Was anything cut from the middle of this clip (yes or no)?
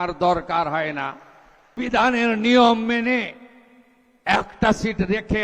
yes